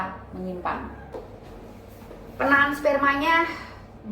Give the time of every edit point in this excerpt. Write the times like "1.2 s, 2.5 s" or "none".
1.3 s